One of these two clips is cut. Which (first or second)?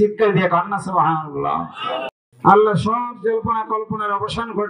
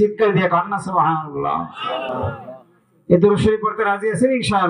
first